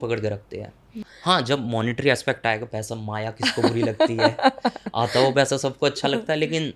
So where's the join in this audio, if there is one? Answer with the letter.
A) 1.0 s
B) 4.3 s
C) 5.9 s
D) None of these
A